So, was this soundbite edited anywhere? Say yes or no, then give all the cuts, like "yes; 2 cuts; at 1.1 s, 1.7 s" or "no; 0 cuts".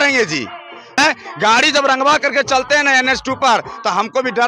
yes; 1 cut; at 1.0 s